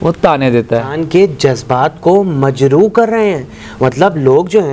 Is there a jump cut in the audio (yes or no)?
yes